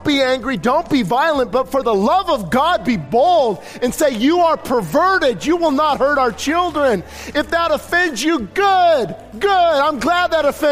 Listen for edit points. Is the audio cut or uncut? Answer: cut